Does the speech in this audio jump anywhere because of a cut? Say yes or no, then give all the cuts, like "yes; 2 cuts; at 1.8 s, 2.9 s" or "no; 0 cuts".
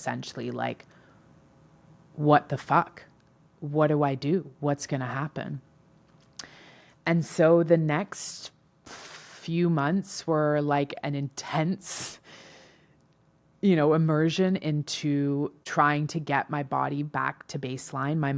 no; 0 cuts